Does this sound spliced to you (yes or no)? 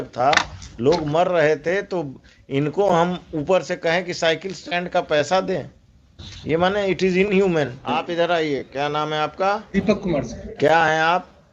yes